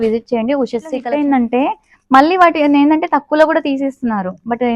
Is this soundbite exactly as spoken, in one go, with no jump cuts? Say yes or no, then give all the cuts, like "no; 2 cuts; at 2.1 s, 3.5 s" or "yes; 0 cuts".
no; 1 cut; at 1.0 s